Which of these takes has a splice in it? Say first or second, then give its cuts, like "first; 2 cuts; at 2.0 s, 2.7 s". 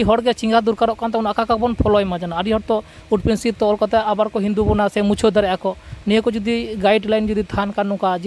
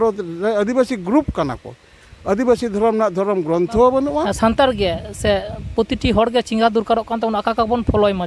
second; 1 cut; at 4.3 s